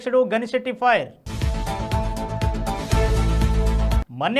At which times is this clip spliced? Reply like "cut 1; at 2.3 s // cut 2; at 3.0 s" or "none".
none